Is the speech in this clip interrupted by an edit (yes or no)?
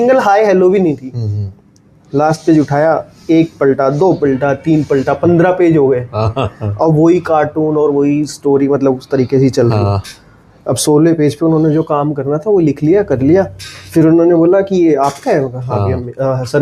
no